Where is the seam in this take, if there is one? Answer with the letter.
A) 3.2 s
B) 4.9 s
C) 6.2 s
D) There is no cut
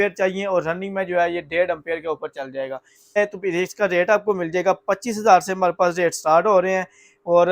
A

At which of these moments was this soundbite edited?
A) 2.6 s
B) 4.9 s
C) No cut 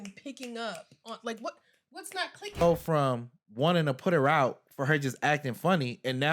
A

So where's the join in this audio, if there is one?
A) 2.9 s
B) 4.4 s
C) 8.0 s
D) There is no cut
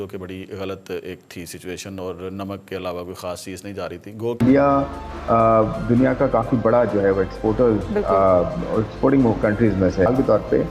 B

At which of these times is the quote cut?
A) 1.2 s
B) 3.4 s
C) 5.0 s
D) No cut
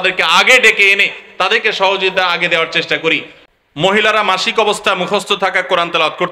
B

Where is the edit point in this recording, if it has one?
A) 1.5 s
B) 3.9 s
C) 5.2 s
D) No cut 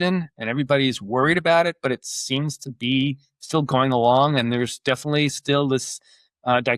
D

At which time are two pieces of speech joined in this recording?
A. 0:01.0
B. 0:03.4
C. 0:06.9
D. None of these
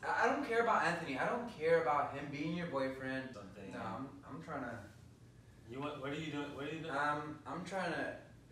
B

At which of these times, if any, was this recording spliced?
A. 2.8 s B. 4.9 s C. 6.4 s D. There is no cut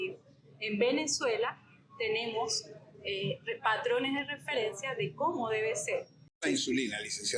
C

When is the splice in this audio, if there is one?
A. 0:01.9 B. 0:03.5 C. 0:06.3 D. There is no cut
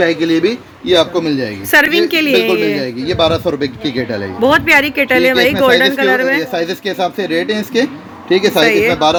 D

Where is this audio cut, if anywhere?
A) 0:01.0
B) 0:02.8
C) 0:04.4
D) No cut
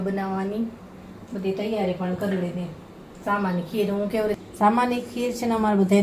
C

